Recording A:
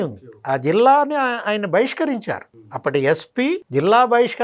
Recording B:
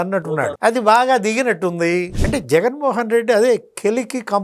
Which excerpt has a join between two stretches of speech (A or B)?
B